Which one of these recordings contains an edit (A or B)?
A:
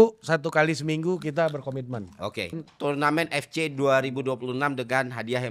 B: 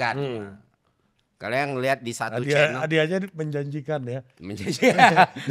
A